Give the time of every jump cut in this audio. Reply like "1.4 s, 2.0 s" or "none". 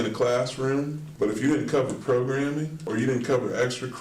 1.0 s, 2.8 s